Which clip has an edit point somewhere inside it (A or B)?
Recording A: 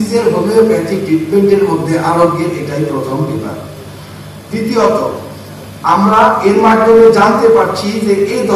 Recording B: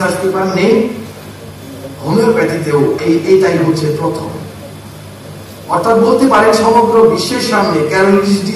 B